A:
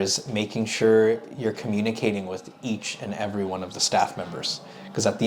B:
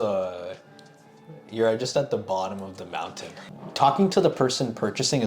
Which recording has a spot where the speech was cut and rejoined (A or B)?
B